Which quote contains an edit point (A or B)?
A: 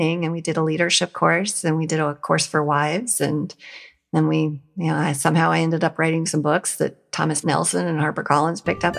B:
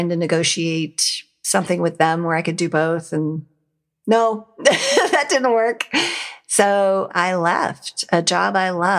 B